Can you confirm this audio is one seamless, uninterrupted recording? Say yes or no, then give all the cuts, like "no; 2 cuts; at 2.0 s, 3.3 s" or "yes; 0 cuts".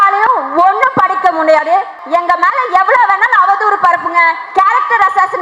no; 1 cut; at 2.0 s